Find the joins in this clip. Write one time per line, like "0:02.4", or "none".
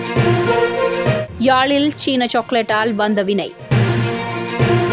0:01.3